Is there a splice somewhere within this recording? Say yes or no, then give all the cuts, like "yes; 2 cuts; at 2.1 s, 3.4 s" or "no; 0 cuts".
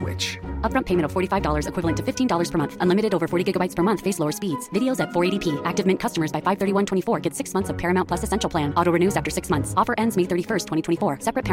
no; 0 cuts